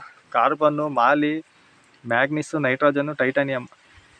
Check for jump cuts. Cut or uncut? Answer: uncut